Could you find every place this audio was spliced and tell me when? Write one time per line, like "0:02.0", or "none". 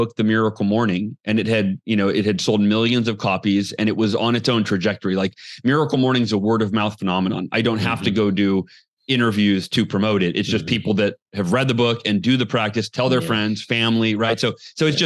none